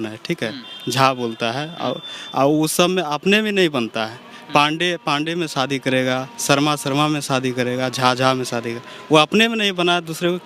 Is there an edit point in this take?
no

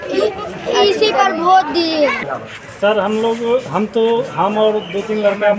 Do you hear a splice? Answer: yes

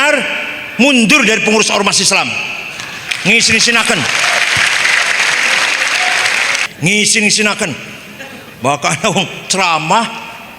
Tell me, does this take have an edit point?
yes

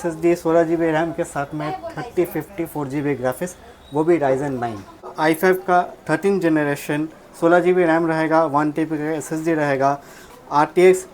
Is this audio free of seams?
no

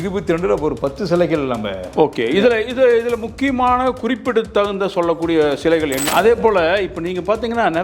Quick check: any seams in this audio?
yes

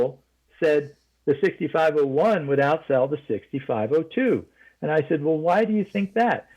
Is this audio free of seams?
yes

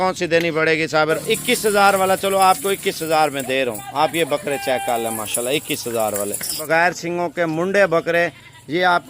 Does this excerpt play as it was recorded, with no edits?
no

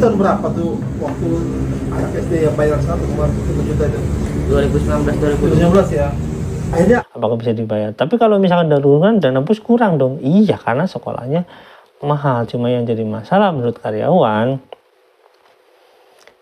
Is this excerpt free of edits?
no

